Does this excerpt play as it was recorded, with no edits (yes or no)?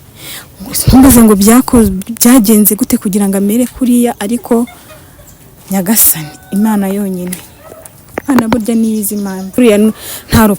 no